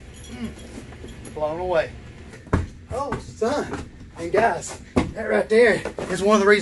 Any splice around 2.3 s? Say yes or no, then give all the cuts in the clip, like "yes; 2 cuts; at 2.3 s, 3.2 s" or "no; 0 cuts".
yes; 1 cut; at 2.3 s